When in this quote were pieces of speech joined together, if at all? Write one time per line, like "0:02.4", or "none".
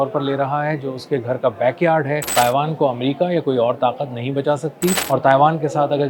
0:02.3
0:05.0